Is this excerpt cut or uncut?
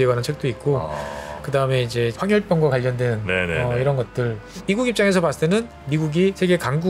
cut